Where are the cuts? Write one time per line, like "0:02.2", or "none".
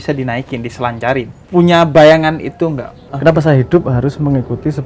0:03.1